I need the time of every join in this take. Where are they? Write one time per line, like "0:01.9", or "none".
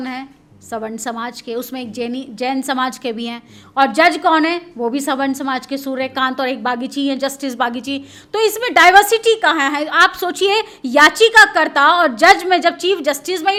none